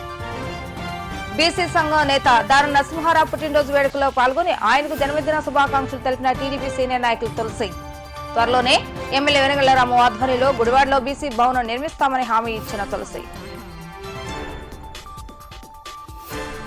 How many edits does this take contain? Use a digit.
1